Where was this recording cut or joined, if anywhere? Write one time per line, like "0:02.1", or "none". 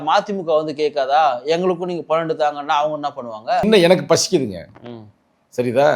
0:03.7